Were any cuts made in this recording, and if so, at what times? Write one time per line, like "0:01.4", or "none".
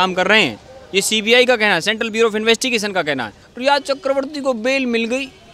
0:03.4